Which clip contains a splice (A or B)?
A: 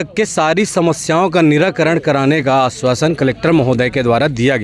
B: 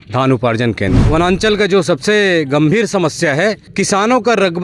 B